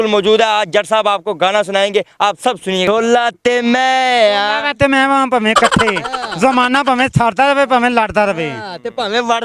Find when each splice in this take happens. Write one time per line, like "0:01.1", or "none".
0:02.9